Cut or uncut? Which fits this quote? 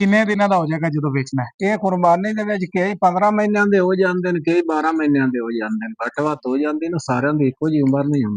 uncut